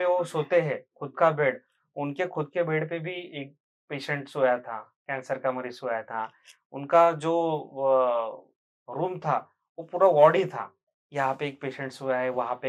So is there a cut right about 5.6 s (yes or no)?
no